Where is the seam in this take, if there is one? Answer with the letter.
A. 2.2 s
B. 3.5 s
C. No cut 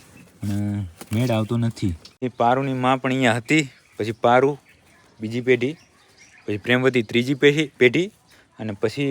A